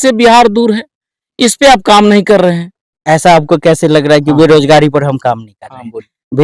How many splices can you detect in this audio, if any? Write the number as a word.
zero